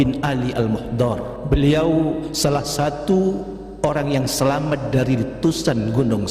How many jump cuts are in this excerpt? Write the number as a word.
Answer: two